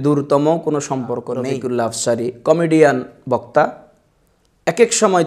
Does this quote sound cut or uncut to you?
cut